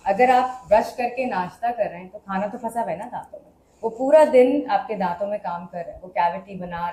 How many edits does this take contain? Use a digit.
0